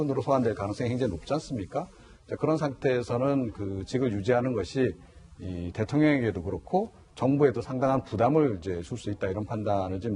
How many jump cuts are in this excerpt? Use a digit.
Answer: 0